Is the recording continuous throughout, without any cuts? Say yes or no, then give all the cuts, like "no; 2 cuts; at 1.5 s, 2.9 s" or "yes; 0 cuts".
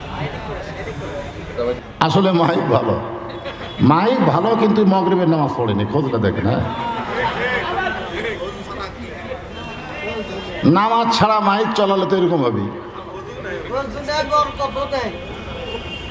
no; 1 cut; at 1.8 s